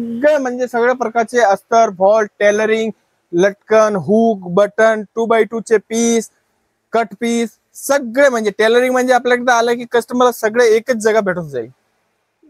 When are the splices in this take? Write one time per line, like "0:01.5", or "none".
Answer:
none